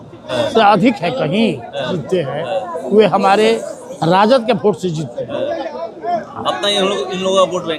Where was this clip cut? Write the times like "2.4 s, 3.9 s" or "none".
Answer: 2.0 s